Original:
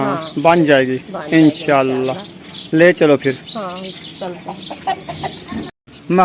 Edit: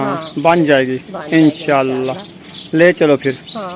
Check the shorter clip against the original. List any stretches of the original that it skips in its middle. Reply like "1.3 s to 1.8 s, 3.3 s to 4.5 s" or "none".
none

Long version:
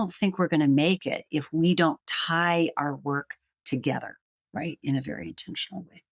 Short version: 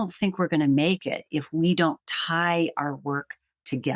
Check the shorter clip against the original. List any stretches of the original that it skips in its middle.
none

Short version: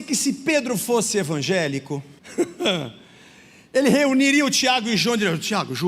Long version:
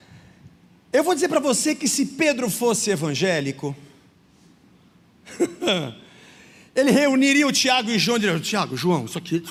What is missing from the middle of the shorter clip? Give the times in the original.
3.9 s to 5.2 s

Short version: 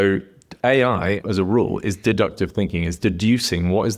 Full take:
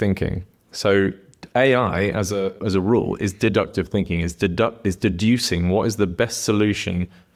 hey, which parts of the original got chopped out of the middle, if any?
2.1 s to 2.6 s, 4.3 s to 5.0 s

